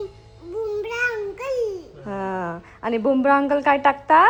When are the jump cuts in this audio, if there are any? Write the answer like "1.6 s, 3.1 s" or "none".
none

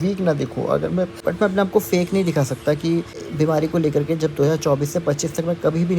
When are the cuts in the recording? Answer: 1.2 s, 3.2 s

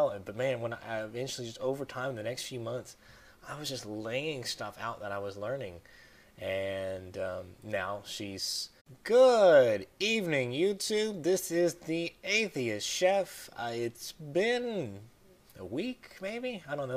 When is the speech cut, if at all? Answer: none

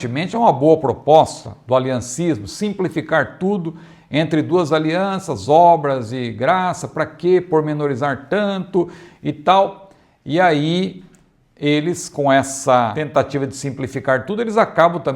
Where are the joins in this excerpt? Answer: 13.0 s

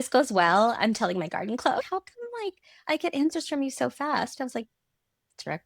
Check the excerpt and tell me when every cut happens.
1.9 s

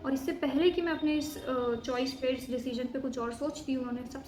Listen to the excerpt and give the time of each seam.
none

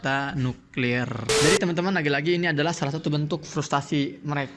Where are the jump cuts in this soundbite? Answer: 1.3 s

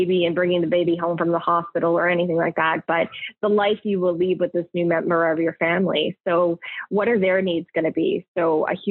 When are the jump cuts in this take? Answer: none

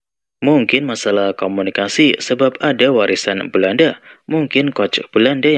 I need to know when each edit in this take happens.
none

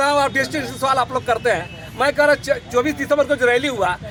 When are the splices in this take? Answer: none

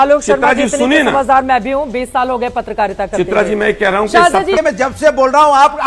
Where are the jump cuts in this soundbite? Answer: 4.6 s

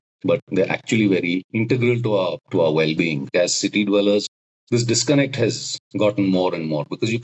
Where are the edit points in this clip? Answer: 1.5 s, 2.4 s, 3.3 s

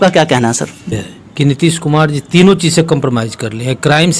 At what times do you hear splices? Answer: 1.0 s

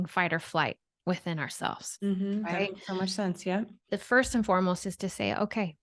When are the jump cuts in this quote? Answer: 3.9 s

